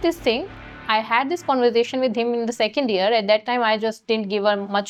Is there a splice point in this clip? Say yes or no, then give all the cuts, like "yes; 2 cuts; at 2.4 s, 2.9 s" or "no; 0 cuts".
no; 0 cuts